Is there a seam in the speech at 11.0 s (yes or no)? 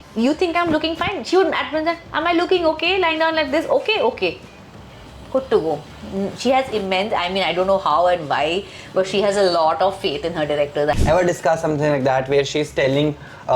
yes